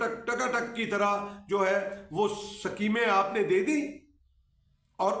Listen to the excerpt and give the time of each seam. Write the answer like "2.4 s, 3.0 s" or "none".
none